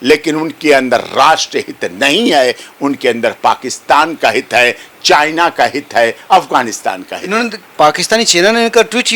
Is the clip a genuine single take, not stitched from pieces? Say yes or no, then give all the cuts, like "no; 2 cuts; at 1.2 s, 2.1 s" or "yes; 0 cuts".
yes; 0 cuts